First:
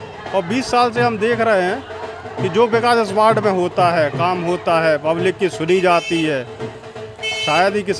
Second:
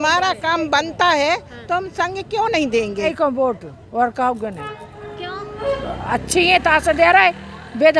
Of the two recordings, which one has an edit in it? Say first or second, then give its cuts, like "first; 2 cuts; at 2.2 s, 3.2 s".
second; 1 cut; at 3.1 s